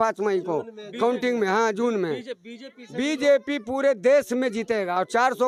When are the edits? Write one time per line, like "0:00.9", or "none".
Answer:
none